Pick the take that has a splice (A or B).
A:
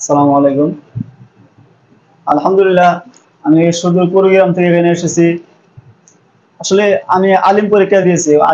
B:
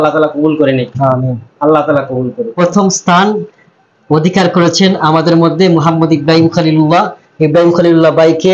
B